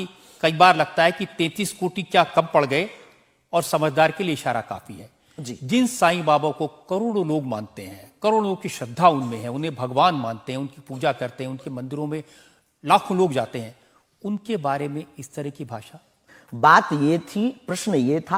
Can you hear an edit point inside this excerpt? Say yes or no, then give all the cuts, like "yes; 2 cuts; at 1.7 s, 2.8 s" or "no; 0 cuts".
no; 0 cuts